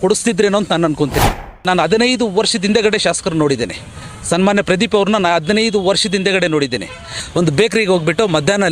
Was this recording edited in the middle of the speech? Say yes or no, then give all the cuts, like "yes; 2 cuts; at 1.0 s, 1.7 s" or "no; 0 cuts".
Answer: yes; 2 cuts; at 1.6 s, 7.2 s